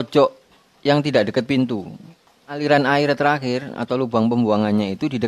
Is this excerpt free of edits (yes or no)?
no